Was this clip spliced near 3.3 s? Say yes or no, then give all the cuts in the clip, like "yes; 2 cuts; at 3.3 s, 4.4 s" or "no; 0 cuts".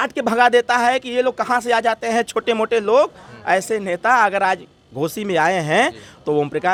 no; 0 cuts